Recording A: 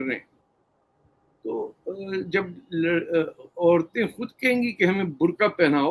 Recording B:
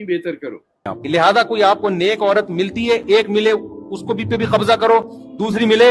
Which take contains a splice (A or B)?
B